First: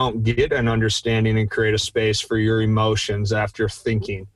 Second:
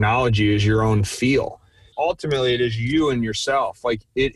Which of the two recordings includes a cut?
second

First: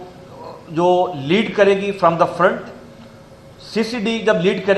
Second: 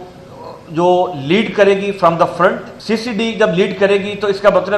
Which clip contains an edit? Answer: second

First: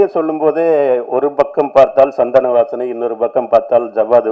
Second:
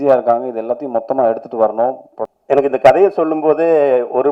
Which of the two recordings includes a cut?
second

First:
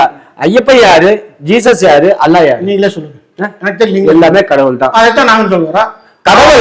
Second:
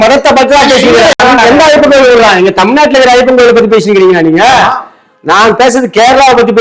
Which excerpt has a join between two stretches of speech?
second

